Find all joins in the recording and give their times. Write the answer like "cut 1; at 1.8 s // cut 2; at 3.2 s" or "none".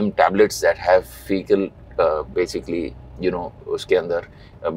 none